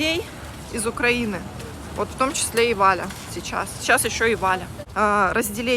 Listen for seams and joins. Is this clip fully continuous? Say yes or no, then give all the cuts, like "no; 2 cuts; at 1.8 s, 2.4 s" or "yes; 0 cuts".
no; 1 cut; at 4.8 s